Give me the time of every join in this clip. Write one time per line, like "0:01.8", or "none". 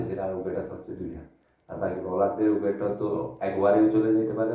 none